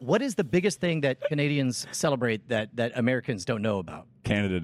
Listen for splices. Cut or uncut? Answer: uncut